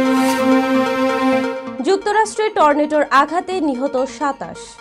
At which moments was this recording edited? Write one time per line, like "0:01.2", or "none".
0:01.6